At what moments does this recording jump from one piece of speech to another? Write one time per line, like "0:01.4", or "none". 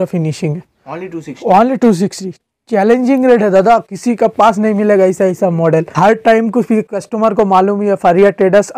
none

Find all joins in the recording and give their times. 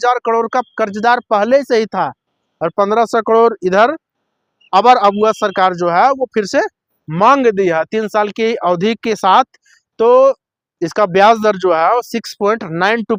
none

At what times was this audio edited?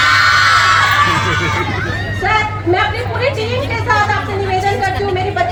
none

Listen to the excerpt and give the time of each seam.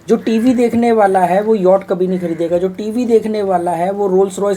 none

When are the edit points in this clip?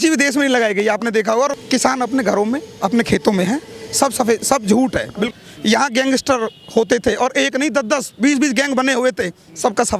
0:01.5
0:05.3

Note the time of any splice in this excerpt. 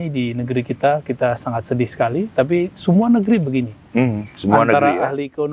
none

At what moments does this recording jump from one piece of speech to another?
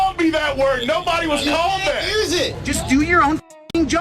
0:02.6

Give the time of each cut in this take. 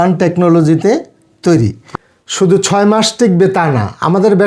0:02.0

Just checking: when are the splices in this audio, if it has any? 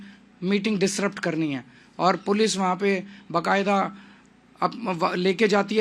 none

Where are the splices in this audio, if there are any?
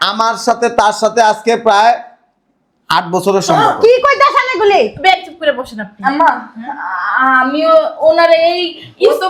none

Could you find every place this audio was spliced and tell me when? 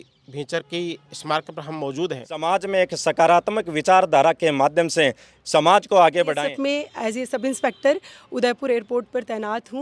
0:02.4
0:06.4

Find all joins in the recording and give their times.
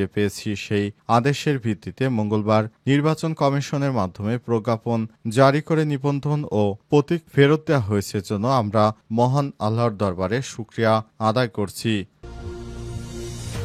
0:12.1

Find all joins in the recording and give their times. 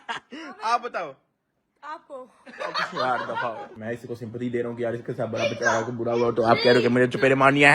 0:03.7

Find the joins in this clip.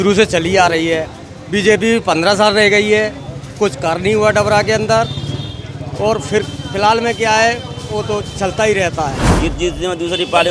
0:09.3

